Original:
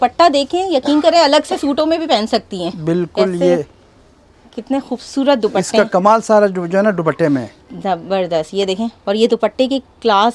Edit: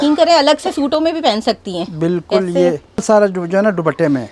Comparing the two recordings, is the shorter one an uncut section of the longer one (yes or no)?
no